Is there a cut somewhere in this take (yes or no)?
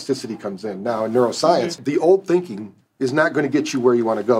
yes